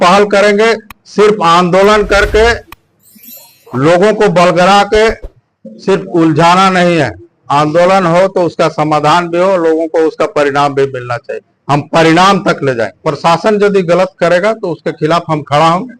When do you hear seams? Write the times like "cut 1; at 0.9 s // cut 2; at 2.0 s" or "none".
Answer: cut 1; at 13.0 s